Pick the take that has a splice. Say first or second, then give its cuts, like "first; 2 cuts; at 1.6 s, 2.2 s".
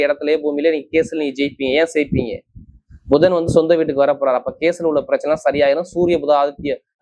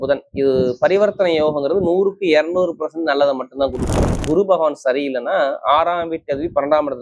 second; 1 cut; at 4.2 s